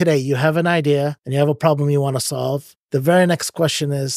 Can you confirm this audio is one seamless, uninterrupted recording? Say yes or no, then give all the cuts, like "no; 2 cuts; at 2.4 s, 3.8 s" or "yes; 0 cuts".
no; 2 cuts; at 1.2 s, 2.7 s